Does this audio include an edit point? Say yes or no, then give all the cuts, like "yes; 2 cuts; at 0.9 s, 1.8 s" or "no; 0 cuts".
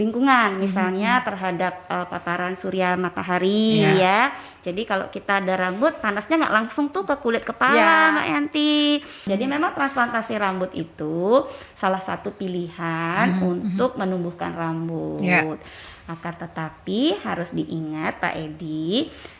yes; 1 cut; at 9.3 s